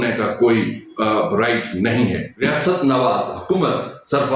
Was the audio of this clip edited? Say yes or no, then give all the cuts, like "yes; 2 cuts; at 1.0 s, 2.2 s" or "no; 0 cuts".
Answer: yes; 1 cut; at 2.4 s